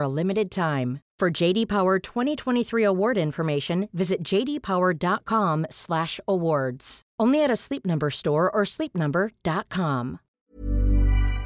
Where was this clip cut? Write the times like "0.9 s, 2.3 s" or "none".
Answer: 10.3 s